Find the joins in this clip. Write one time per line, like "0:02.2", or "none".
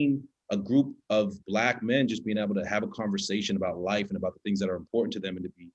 none